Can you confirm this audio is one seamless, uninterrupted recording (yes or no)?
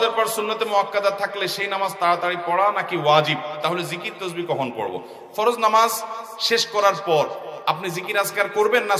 yes